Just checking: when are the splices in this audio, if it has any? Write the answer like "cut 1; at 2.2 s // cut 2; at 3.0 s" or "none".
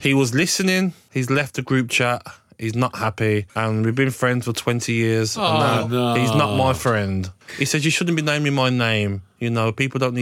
cut 1; at 1.0 s // cut 2; at 3.5 s // cut 3; at 7.4 s